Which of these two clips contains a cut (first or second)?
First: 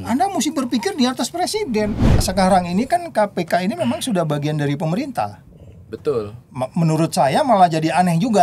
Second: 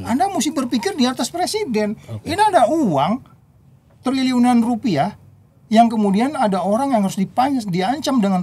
first